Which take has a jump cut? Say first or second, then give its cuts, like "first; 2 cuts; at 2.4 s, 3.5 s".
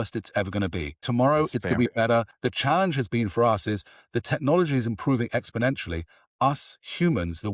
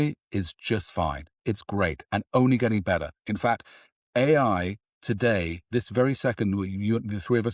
first; 2 cuts; at 1.0 s, 2.3 s